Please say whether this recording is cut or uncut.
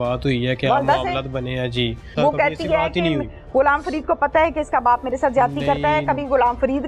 cut